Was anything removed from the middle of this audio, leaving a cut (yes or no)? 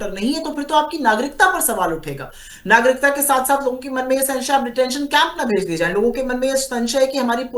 no